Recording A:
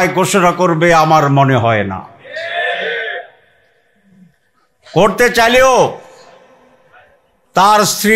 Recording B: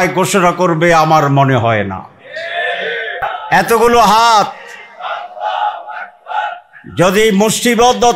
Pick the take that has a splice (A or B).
B